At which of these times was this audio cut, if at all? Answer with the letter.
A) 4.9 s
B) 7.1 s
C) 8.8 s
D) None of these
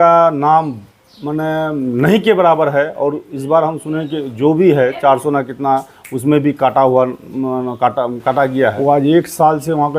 C